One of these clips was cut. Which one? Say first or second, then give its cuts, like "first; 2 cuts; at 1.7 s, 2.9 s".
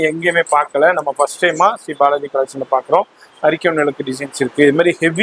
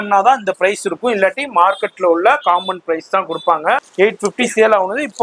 second; 1 cut; at 3.9 s